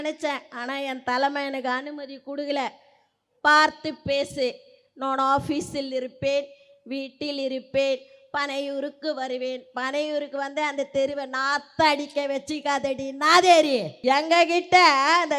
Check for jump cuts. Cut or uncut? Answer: cut